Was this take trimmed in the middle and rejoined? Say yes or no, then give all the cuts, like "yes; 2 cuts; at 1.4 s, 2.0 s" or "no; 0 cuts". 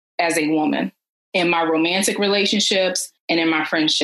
no; 0 cuts